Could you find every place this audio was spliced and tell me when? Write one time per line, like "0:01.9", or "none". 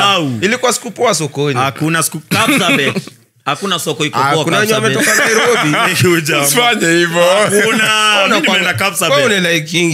none